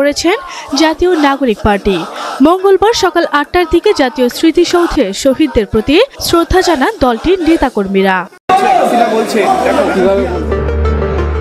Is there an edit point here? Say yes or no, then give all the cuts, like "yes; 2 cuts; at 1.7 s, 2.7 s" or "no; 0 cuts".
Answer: yes; 1 cut; at 8.3 s